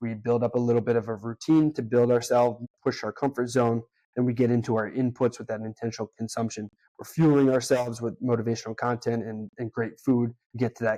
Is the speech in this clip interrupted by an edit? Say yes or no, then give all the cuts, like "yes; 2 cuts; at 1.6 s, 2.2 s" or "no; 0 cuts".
no; 0 cuts